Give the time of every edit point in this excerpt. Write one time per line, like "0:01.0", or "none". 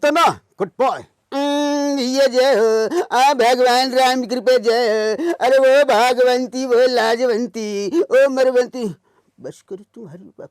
0:01.1